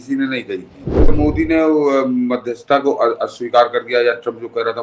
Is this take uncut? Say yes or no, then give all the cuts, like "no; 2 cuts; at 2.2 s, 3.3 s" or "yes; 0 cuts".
no; 1 cut; at 1.1 s